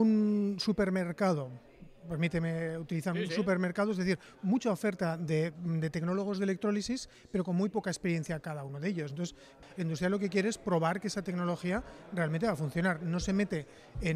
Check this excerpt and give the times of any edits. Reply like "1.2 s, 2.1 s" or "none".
9.5 s